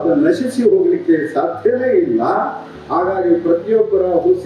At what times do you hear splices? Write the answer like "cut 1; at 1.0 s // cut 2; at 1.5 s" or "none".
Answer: none